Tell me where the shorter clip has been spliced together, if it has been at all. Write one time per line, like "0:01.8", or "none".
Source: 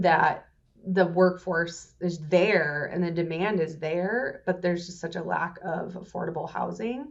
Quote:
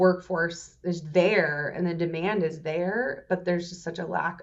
none